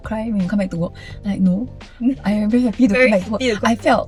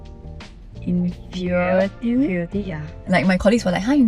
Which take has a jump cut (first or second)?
second